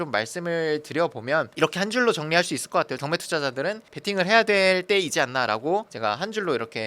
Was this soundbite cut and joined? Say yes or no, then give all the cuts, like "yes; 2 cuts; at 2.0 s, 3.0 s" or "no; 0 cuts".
yes; 1 cut; at 3.0 s